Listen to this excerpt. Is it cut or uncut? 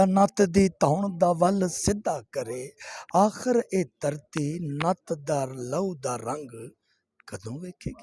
uncut